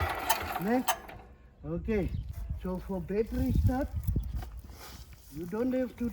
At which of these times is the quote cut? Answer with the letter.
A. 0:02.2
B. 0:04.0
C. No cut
A